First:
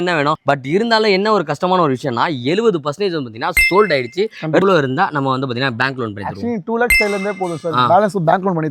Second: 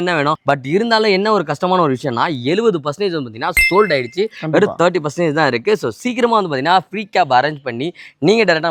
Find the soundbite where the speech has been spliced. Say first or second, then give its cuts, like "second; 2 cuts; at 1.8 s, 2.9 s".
first; 1 cut; at 4.6 s